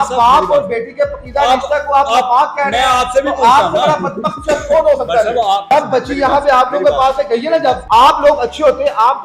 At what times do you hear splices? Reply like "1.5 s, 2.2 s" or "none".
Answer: 5.7 s, 7.8 s

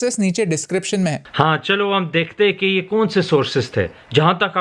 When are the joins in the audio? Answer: 1.2 s

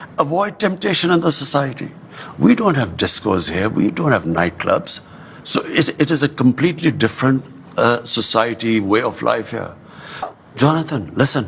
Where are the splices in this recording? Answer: 10.3 s

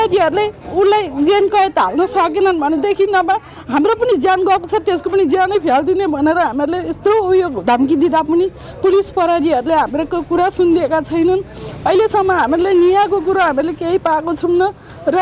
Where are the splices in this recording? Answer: none

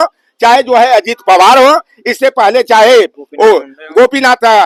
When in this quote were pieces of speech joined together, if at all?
none

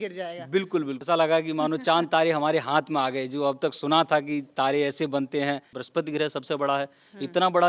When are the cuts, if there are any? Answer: 0.9 s, 5.8 s

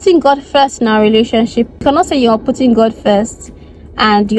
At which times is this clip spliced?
1.8 s

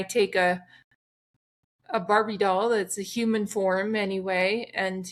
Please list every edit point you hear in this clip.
none

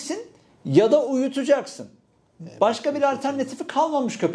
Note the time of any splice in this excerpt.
none

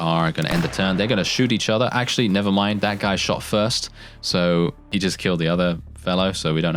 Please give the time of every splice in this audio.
4.9 s

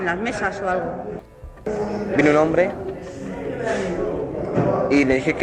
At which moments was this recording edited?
1.2 s

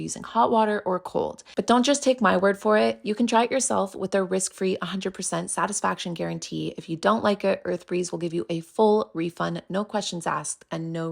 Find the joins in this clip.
1.5 s

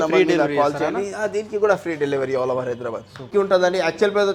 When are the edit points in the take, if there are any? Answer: 3.3 s

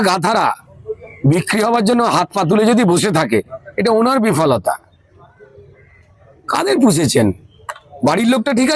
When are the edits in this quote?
none

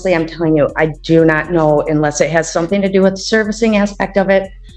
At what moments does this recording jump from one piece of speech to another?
none

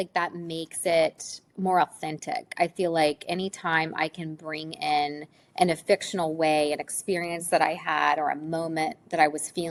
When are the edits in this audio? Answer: none

